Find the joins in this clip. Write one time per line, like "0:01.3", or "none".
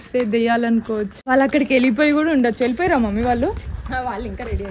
0:01.2